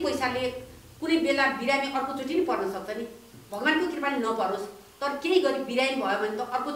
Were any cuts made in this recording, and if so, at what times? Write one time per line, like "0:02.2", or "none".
none